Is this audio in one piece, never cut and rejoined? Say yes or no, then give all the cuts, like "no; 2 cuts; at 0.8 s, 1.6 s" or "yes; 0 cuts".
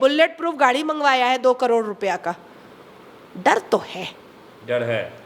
yes; 0 cuts